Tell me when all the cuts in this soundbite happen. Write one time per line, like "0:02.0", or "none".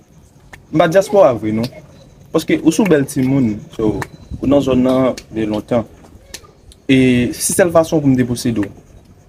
none